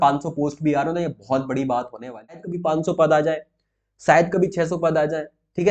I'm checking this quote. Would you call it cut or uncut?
cut